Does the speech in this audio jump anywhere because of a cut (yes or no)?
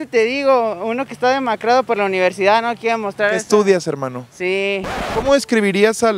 no